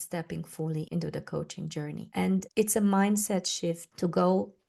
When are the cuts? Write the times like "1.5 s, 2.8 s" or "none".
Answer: 0.9 s, 2.4 s, 3.9 s